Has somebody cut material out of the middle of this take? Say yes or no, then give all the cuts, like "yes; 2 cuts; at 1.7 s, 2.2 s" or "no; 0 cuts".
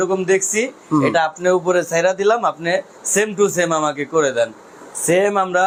no; 0 cuts